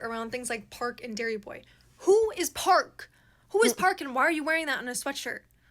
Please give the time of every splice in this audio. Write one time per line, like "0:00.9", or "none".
none